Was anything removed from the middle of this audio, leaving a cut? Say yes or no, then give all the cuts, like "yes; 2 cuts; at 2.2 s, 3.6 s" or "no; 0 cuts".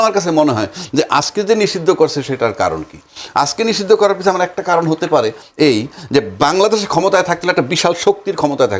no; 0 cuts